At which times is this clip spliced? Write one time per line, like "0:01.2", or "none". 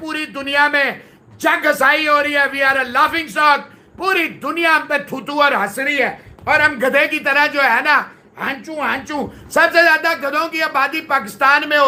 none